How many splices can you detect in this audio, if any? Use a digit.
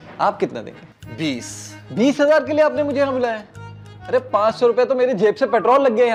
0